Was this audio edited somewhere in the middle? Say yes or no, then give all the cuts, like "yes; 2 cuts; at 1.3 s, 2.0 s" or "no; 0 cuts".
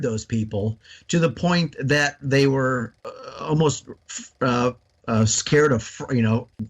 yes; 1 cut; at 2.9 s